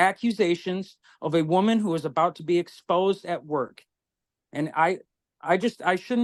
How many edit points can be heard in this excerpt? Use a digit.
0